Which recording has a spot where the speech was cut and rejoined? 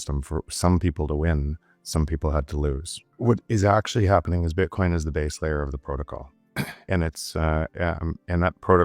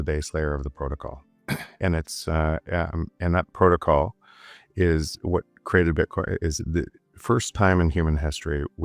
first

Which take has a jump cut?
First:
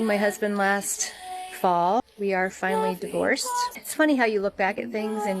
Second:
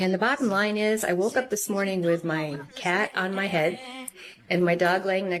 first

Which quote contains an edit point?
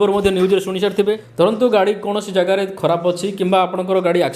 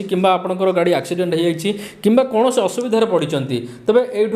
first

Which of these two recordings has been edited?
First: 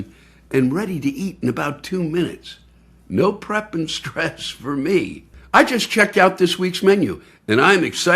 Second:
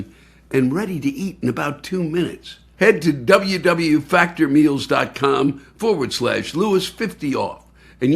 second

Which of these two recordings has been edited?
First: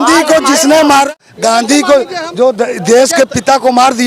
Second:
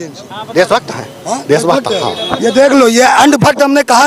first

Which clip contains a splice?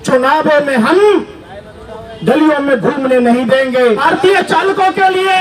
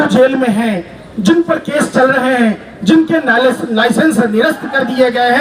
first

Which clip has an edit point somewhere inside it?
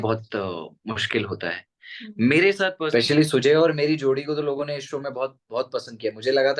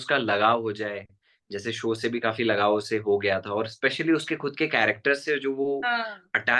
first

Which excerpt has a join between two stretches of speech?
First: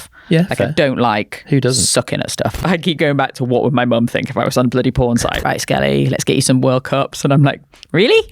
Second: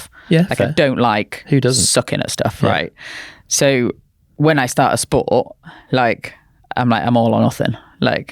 first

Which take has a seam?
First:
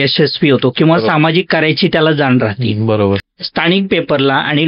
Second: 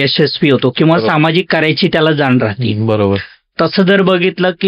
first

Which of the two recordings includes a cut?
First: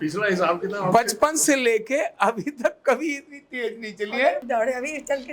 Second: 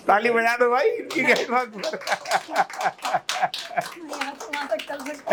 first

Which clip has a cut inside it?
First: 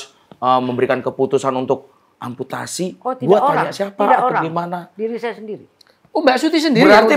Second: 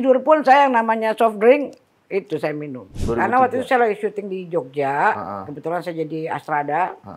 second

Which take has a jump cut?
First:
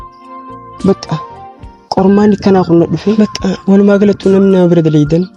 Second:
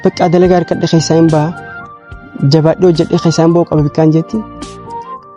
first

